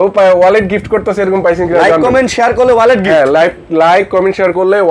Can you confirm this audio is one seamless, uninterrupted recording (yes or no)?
yes